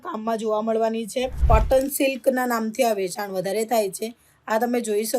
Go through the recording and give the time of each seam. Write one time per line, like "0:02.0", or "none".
0:01.4